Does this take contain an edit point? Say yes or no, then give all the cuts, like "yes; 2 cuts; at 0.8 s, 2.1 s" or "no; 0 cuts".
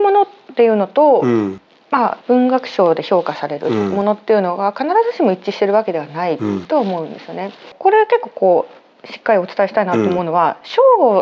yes; 2 cuts; at 2.2 s, 7.7 s